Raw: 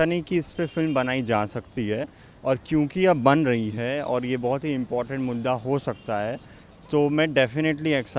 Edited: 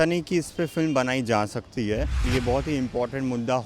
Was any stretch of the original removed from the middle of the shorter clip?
yes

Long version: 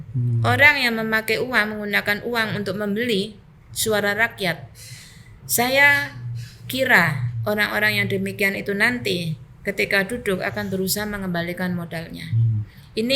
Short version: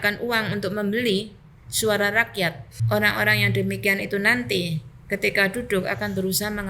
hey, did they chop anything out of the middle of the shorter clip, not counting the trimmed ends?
yes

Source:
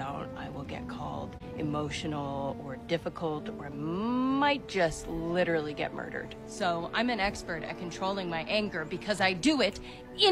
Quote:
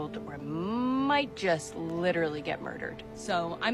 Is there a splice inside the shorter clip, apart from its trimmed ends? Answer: no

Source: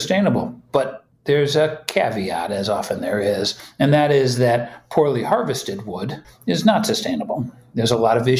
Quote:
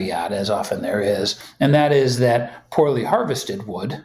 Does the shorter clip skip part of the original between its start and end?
no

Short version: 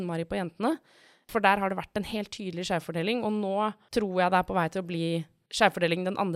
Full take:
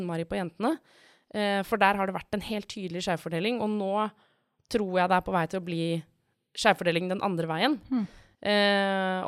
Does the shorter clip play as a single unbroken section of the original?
no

